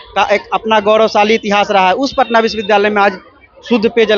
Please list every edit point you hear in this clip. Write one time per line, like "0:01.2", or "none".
none

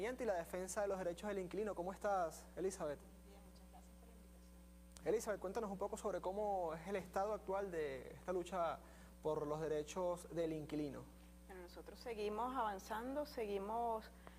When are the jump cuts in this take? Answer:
none

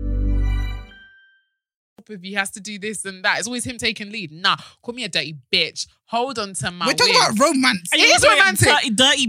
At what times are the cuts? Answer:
0:01.9

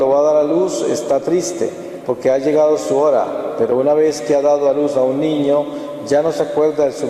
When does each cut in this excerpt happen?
none

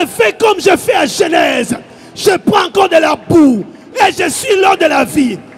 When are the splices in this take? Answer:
none

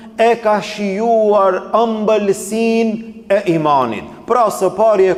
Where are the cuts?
none

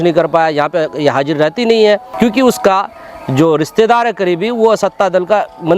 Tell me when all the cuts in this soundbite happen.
0:02.1

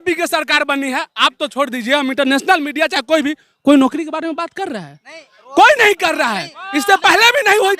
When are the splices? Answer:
none

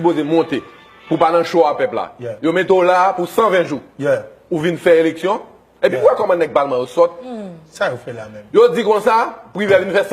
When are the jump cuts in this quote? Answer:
0:01.2

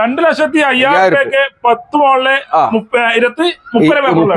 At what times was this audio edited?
none

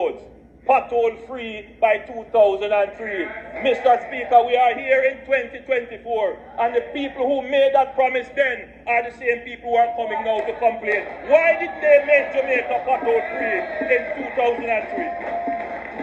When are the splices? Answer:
none

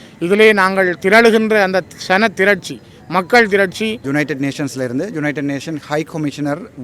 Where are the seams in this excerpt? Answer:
0:04.0

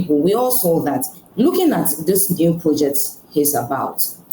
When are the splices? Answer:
0:01.2

